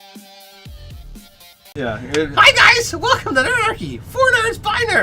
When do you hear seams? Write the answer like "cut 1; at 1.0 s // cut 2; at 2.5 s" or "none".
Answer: cut 1; at 1.7 s